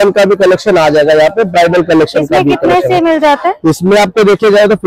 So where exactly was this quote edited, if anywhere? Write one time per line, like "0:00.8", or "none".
none